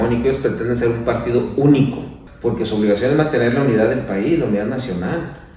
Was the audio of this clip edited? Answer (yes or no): yes